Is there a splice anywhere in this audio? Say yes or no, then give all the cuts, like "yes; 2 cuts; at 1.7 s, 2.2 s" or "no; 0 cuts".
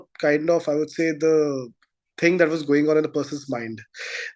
no; 0 cuts